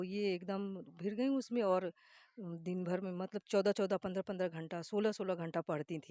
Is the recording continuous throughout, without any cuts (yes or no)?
yes